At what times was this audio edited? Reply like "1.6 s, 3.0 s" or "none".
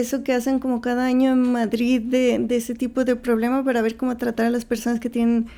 none

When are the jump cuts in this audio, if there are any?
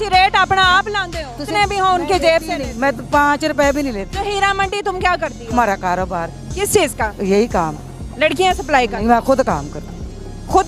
1.4 s

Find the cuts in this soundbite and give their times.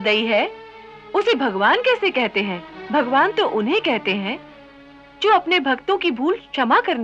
2.7 s

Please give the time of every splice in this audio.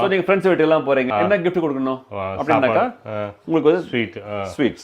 1.1 s

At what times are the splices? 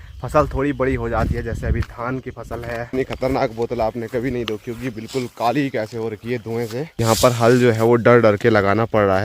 2.9 s, 7.0 s

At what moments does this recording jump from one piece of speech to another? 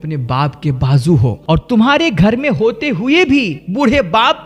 1.4 s

